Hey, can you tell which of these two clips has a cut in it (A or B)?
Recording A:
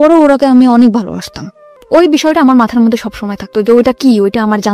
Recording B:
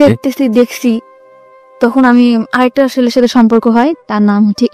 A